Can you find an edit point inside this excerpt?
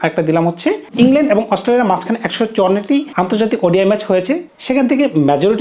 yes; 3 cuts; at 0.8 s, 3.1 s, 4.5 s

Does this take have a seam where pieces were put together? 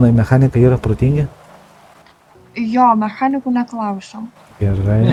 no; 0 cuts

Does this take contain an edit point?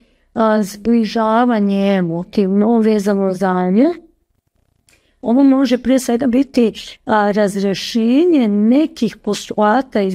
no; 0 cuts

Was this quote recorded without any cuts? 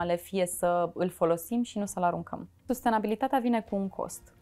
no; 1 cut; at 2.6 s

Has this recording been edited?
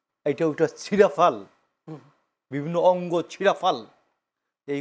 no; 0 cuts

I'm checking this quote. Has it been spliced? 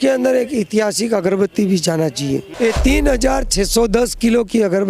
yes; 1 cut; at 2.5 s

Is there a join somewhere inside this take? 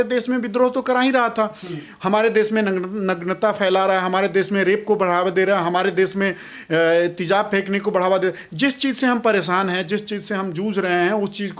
no; 0 cuts

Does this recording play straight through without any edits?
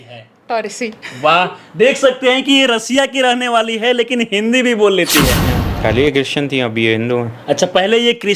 no; 1 cut; at 5.5 s

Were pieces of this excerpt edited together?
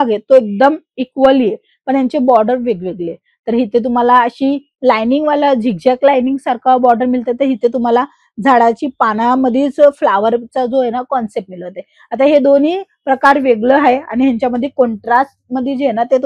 no; 0 cuts

